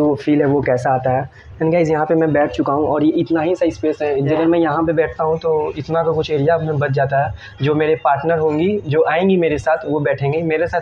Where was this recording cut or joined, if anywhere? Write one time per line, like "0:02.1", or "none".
0:04.3